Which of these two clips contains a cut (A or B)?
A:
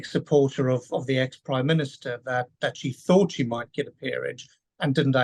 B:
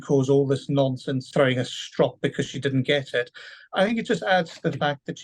B